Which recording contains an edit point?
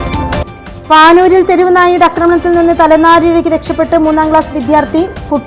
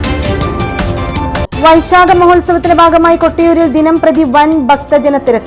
second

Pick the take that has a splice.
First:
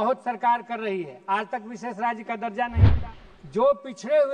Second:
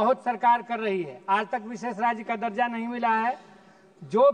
first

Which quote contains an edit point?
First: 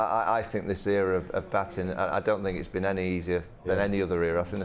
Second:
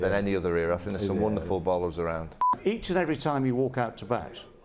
second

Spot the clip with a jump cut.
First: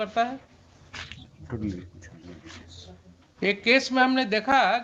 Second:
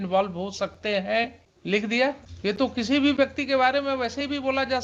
second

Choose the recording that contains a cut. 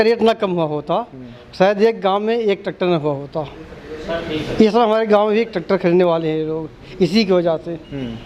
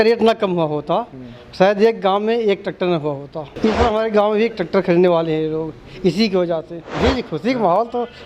second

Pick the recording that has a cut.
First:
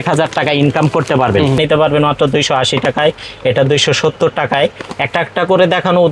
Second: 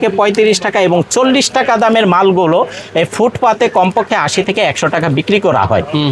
first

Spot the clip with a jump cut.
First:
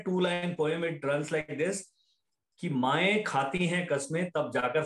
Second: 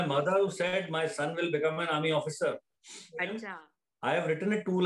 second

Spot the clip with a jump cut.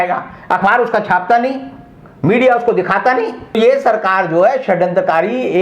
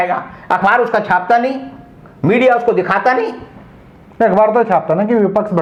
first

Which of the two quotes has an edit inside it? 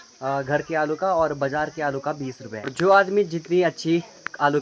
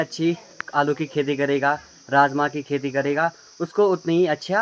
first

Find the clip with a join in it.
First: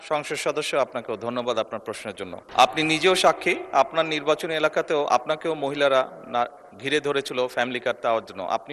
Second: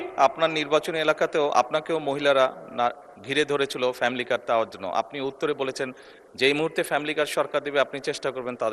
first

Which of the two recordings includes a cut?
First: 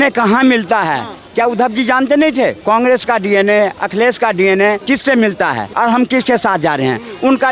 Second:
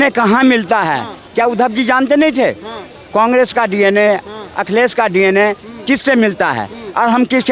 first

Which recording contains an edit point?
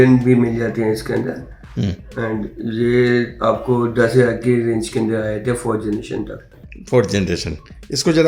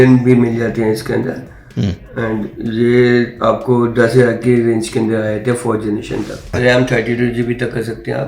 second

